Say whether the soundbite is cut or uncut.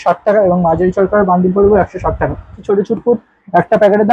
cut